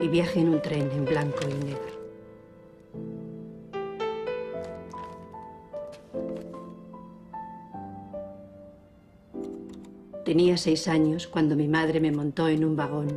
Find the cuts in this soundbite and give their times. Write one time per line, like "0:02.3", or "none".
0:06.9